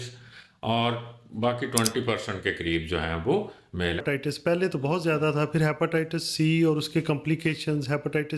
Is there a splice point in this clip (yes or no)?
yes